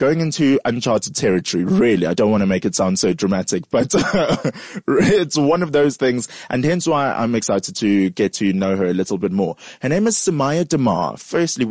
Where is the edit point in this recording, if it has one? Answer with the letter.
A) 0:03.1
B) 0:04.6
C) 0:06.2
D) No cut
D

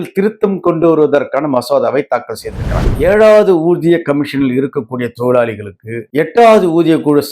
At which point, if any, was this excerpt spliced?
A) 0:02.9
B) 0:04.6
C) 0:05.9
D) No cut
A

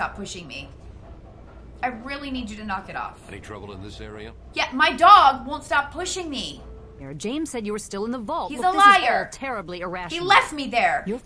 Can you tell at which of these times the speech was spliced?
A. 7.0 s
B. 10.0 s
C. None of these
A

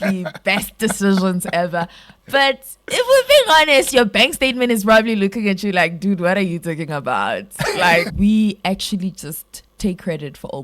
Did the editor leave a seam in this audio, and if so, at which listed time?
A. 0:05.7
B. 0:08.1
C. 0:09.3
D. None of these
B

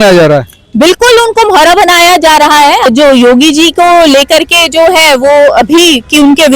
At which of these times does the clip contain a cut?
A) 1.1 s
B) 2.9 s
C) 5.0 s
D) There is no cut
B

